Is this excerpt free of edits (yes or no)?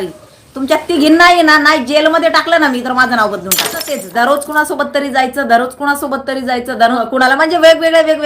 no